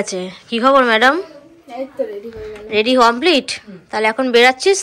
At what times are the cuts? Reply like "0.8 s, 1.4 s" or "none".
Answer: none